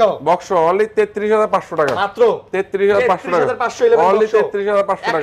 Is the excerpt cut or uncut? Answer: uncut